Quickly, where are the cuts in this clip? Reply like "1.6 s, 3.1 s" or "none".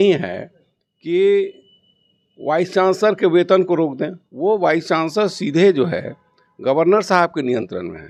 none